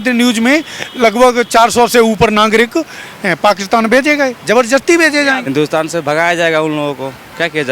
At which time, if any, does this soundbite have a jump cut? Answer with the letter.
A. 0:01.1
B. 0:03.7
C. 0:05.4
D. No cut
C